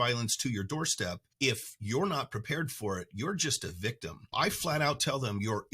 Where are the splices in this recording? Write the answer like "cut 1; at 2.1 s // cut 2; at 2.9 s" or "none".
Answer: cut 1; at 1.2 s // cut 2; at 4.3 s